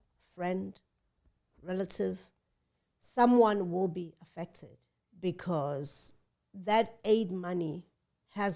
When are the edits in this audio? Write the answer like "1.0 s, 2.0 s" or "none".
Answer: none